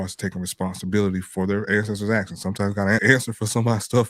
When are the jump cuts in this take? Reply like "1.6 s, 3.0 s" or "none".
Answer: 1.3 s, 3.0 s